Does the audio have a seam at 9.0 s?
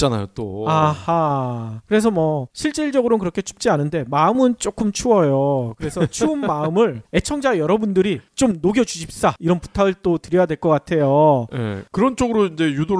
no; 0 cuts

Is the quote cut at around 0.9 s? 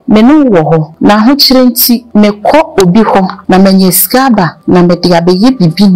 yes; 4 cuts; at 0.9 s, 2.1 s, 3.4 s, 4.6 s

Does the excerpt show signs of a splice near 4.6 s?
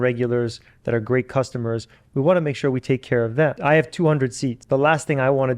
yes; 2 cuts; at 3.6 s, 4.6 s

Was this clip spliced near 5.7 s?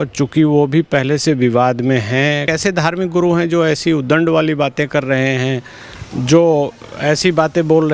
no; 1 cut; at 2.5 s

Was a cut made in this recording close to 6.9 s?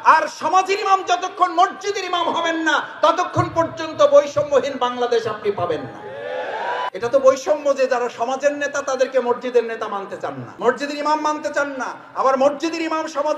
yes; 2 cuts; at 6.9 s, 10.4 s

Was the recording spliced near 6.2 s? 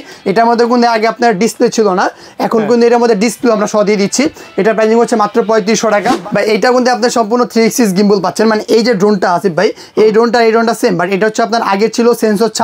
yes; 1 cut; at 6.2 s

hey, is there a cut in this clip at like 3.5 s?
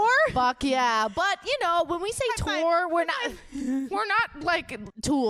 no; 0 cuts

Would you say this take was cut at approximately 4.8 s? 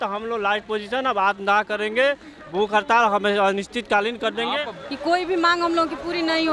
yes; 1 cut; at 4.8 s

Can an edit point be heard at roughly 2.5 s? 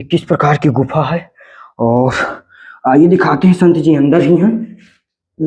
no; 0 cuts

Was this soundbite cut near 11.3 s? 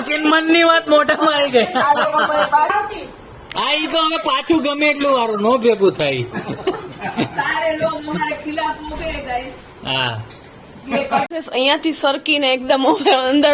yes; 2 cuts; at 2.7 s, 11.3 s

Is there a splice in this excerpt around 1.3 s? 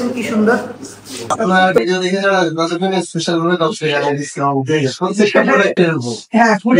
yes; 1 cut; at 1.3 s

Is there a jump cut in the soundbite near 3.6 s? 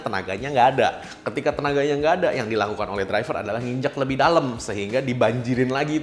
no; 0 cuts

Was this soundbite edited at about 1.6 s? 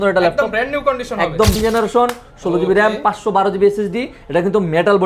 yes; 1 cut; at 1.6 s

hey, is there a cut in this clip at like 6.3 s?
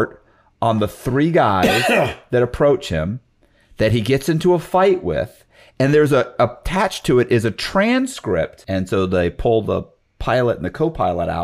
no; 1 cut; at 8.6 s

